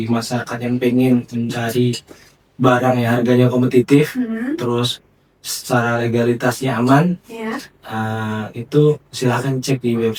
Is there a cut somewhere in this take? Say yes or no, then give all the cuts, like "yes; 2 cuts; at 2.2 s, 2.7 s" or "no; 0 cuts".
no; 0 cuts